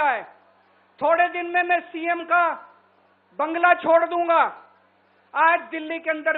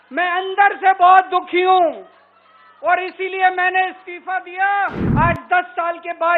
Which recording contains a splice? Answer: second; 1 cut; at 5.0 s

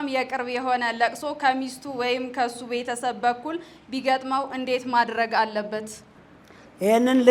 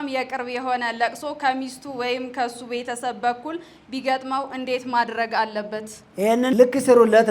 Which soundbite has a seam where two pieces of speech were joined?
second; 1 cut; at 6.4 s

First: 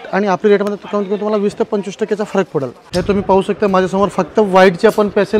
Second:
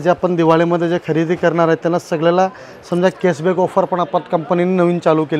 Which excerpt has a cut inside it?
first; 1 cut; at 2.8 s

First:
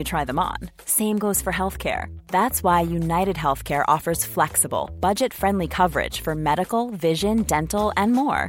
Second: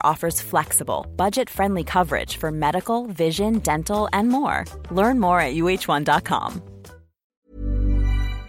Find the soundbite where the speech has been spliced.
second; 1 cut; at 7.4 s

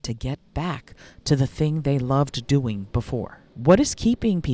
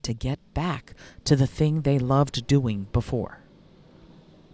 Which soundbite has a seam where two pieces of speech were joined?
first; 1 cut; at 3.4 s

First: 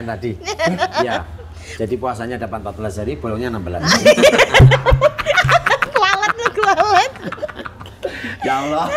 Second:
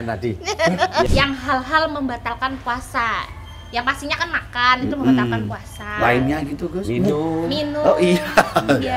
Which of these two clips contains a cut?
second; 1 cut; at 1.1 s

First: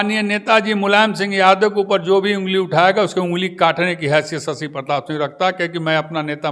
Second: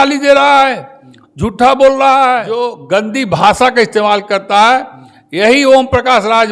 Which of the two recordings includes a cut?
second; 1 cut; at 2.7 s

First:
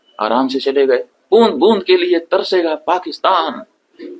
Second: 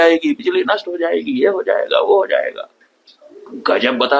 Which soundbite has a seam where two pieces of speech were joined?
first; 1 cut; at 1.1 s

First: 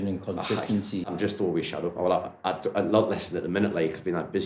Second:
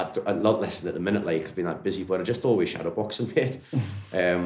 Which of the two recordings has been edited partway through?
first; 1 cut; at 1.1 s

